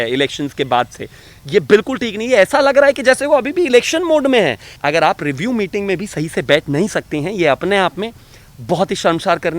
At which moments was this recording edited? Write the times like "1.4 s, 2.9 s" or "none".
4.7 s